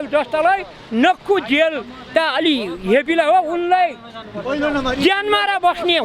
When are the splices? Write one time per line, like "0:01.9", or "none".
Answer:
none